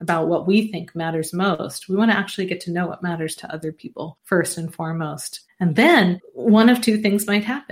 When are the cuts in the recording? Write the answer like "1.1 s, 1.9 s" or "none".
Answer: none